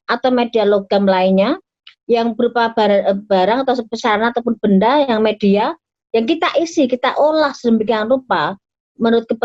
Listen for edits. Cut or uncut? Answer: uncut